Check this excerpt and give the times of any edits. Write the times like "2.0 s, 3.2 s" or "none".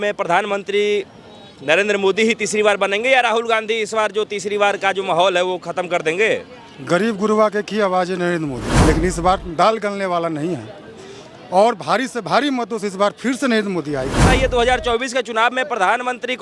8.7 s, 14.2 s